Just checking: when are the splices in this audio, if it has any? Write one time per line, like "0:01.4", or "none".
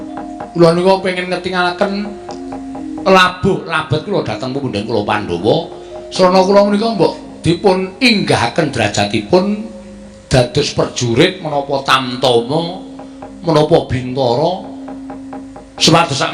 none